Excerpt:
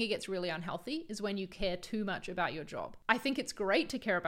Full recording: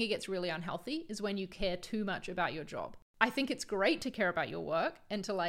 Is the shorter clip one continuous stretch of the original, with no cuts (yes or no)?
no